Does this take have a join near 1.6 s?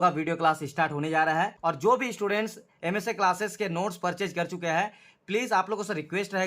yes; 1 cut; at 1.6 s

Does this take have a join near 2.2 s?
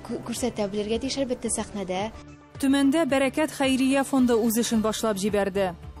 yes; 1 cut; at 2.2 s

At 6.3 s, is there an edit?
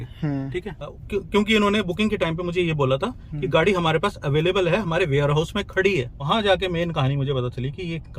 yes; 2 cuts; at 1.0 s, 6.3 s

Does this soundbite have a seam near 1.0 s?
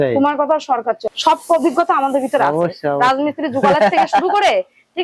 yes; 1 cut; at 1.0 s

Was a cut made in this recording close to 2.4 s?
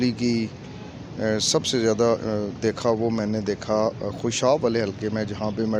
no; 0 cuts

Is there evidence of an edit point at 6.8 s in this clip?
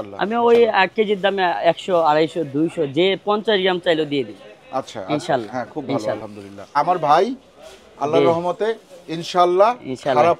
yes; 1 cut; at 6.8 s

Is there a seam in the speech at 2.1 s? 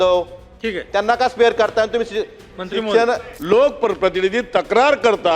no; 1 cut; at 3.3 s

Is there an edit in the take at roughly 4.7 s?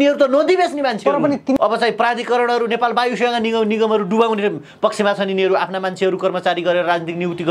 no; 1 cut; at 1.6 s

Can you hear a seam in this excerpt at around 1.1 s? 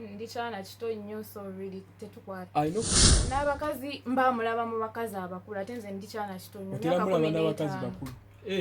no; 1 cut; at 3.0 s

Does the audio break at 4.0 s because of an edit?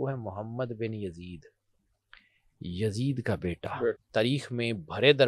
yes; 1 cut; at 4.0 s

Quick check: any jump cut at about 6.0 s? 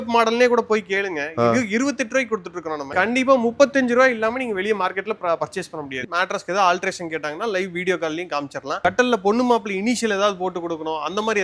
yes; 2 cuts; at 2.9 s, 6.0 s

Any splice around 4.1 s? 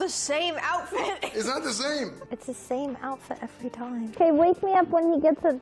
yes; 2 cuts; at 2.2 s, 4.1 s

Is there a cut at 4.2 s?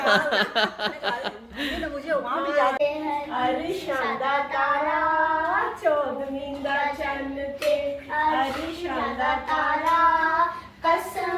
no; 1 cut; at 2.8 s

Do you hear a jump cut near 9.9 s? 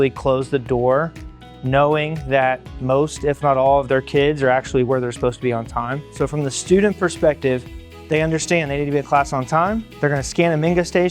yes; 2 cuts; at 6.0 s, 9.9 s

